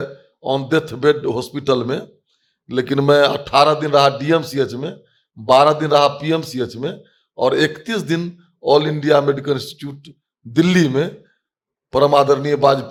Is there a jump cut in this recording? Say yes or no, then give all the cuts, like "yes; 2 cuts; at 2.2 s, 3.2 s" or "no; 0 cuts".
no; 0 cuts